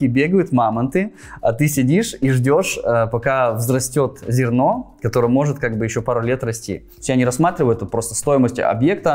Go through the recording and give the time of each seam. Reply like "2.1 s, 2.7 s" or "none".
6.9 s